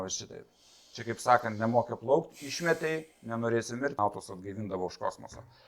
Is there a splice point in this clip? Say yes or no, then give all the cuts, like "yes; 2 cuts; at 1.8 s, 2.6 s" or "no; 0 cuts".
yes; 1 cut; at 4.0 s